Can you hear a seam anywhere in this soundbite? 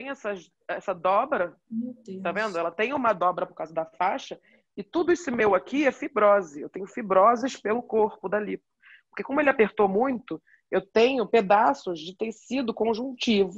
no; 0 cuts

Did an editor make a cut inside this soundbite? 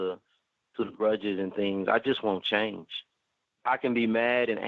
yes; 1 cut; at 3.5 s

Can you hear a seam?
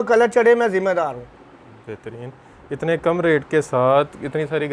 no; 0 cuts

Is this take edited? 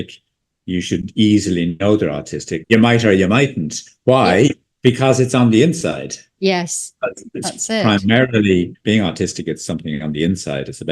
yes; 2 cuts; at 2.5 s, 8.7 s

